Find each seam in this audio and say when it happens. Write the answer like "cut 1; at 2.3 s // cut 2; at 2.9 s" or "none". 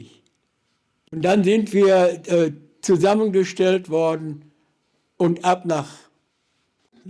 cut 1; at 1.1 s